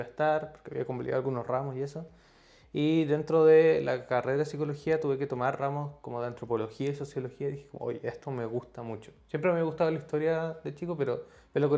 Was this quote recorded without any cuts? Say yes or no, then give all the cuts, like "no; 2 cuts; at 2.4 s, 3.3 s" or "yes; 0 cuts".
yes; 0 cuts